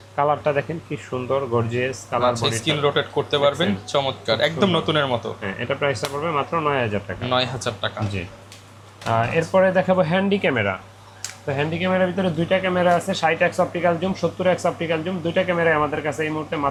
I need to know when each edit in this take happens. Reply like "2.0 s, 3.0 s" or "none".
none